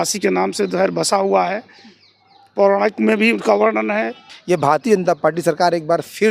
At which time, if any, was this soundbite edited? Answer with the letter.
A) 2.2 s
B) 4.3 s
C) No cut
B